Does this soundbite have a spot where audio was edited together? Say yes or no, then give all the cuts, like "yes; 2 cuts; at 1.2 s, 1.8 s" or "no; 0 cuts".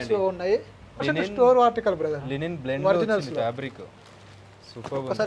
yes; 1 cut; at 1.0 s